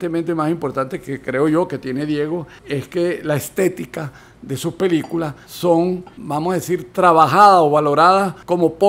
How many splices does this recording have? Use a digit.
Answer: 0